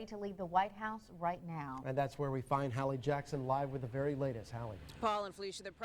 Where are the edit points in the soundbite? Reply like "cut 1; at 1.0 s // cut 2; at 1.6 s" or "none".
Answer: cut 1; at 4.8 s